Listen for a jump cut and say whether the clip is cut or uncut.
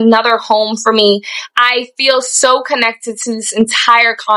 uncut